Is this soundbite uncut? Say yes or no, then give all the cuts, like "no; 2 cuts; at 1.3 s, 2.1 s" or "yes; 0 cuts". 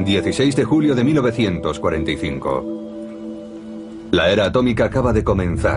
yes; 0 cuts